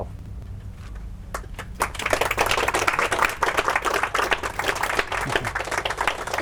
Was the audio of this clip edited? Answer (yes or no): no